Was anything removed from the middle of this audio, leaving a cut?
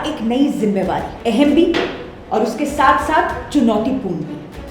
yes; 1 cut; at 1.1 s

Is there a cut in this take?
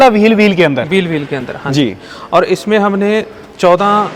no; 0 cuts

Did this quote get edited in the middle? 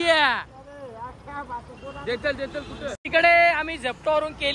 yes; 1 cut; at 3.0 s

